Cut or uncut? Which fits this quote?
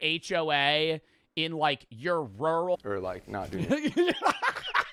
uncut